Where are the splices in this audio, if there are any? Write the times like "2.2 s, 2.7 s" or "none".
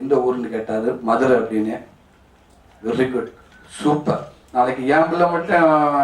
4.4 s